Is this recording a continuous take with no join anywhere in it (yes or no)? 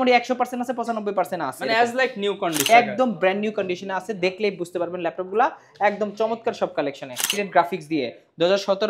no